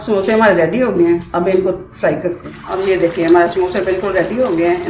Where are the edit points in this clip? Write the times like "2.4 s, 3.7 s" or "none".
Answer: 2.5 s